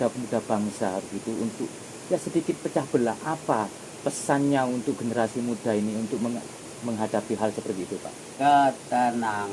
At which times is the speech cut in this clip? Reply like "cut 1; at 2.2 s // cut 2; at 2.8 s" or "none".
cut 1; at 8.3 s